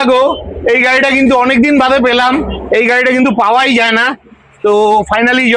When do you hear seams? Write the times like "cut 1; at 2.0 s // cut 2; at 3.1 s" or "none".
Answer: none